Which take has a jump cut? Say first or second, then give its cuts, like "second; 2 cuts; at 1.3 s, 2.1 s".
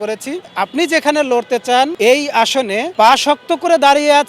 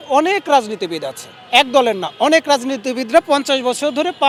first; 2 cuts; at 1.9 s, 2.9 s